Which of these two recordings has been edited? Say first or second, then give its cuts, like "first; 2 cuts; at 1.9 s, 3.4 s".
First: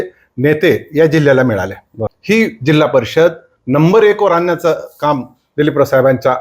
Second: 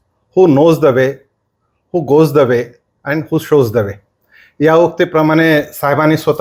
first; 1 cut; at 2.1 s